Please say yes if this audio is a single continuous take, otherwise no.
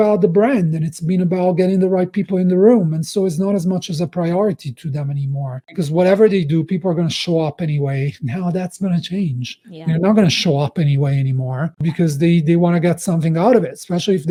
yes